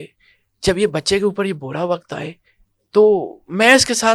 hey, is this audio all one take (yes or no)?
yes